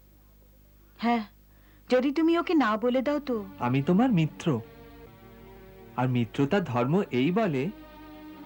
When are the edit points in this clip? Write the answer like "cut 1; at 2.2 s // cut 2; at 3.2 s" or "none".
cut 1; at 3.5 s